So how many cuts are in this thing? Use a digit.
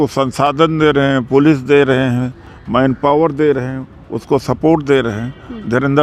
0